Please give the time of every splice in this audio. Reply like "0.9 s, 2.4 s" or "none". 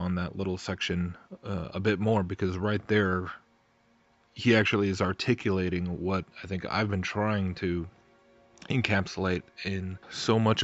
1.3 s